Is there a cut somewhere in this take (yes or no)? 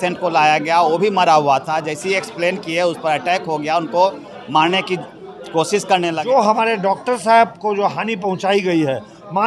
yes